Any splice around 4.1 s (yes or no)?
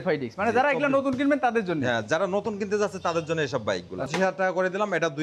yes